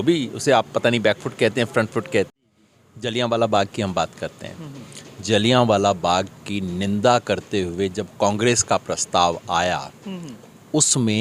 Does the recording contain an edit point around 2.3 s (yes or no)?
yes